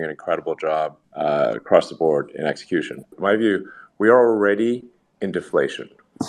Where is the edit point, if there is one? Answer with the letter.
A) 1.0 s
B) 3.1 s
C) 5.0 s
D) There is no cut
B